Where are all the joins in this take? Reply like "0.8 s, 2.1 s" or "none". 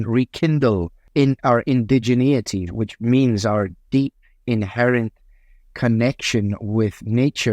1.0 s, 2.6 s